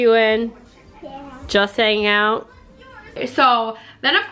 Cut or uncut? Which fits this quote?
cut